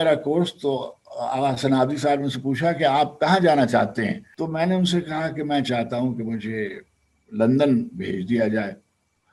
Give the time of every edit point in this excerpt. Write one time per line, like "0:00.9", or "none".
0:04.3